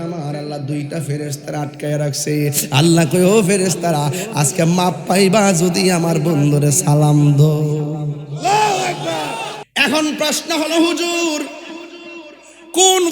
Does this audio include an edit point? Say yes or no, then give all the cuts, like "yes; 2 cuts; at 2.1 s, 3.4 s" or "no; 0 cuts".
yes; 1 cut; at 9.6 s